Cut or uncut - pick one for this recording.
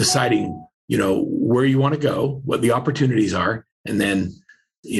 uncut